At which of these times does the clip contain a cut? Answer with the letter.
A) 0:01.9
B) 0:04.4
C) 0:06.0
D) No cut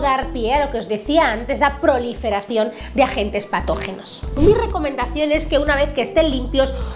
B